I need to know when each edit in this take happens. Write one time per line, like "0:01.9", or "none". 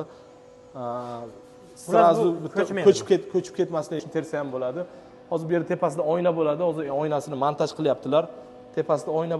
0:04.0

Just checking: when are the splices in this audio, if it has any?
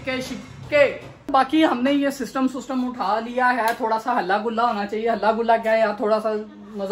0:01.1

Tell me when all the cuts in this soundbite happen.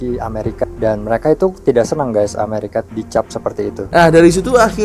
0:03.8

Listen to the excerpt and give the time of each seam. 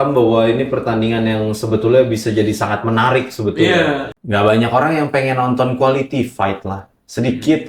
0:04.1

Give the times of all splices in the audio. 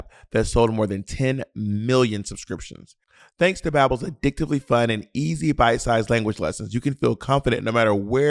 none

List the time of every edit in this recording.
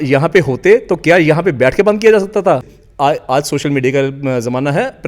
0:02.7

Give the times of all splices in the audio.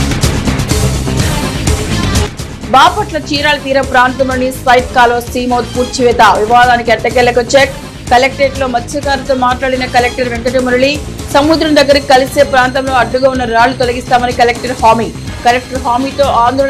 none

